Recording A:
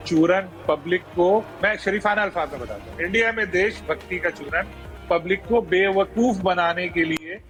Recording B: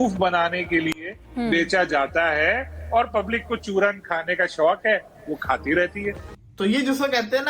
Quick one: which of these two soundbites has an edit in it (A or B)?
B